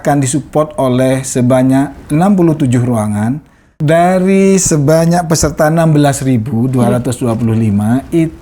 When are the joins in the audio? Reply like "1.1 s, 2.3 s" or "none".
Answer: 3.8 s

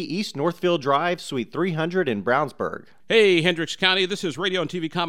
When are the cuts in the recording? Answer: 2.9 s

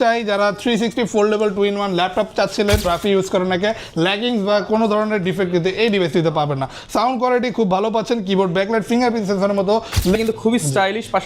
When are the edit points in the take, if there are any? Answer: 2.9 s, 10.2 s

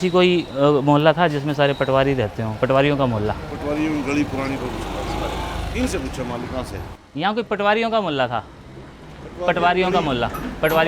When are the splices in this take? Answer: 6.8 s

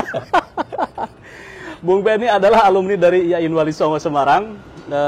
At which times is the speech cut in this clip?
none

